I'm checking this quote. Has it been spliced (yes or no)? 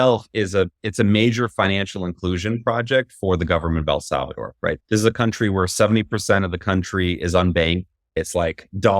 no